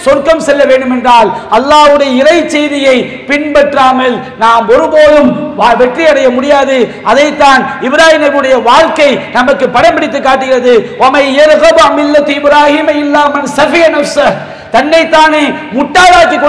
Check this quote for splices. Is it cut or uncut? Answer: uncut